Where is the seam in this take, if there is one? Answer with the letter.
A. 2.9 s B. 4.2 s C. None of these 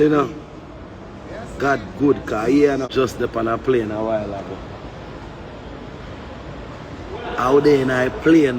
A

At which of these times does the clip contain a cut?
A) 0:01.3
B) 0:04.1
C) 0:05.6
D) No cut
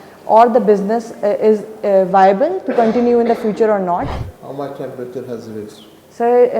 B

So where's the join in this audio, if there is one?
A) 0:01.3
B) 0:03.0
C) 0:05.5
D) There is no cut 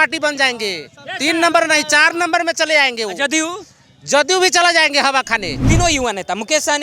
C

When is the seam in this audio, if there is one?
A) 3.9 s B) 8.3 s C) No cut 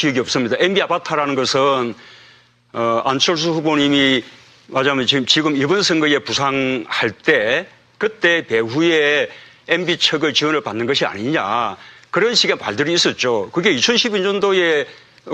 C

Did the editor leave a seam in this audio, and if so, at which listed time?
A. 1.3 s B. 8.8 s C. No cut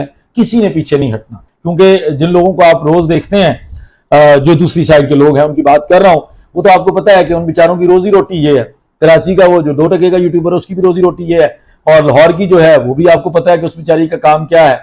A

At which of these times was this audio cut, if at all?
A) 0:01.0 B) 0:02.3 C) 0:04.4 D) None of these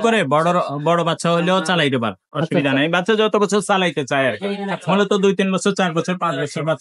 D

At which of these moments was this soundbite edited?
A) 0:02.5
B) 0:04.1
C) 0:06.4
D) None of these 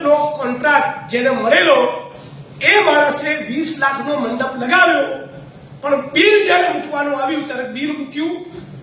D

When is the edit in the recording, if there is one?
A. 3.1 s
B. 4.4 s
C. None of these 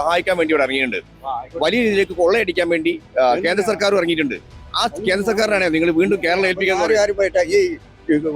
C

